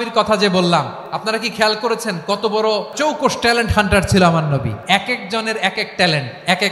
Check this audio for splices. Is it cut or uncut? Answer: cut